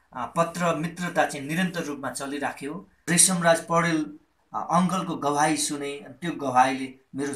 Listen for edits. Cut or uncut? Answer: cut